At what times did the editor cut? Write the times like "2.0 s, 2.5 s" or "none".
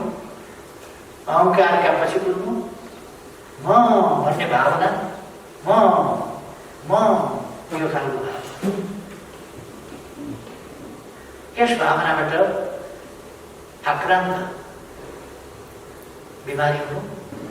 none